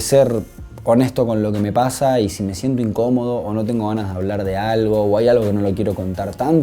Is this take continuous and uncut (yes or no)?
yes